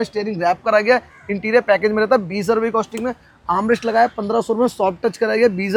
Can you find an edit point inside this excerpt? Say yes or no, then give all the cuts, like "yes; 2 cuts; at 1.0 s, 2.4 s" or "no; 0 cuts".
no; 0 cuts